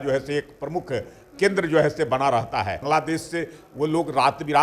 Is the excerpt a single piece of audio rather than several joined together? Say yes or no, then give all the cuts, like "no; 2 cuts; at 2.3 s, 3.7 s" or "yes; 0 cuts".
no; 1 cut; at 2.8 s